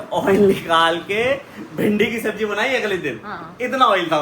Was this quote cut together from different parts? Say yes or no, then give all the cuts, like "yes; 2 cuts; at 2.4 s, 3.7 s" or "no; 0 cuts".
yes; 1 cut; at 3.3 s